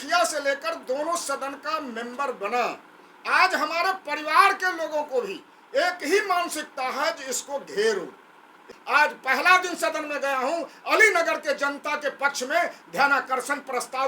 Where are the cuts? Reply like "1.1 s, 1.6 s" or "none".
8.7 s